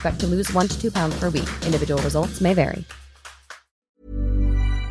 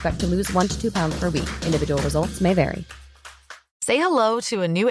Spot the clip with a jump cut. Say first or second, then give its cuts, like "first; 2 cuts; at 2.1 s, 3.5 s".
first; 1 cut; at 3.7 s